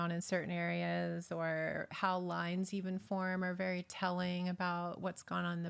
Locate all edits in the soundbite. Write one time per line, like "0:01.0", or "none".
none